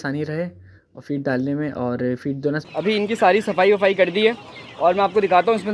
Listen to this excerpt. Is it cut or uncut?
cut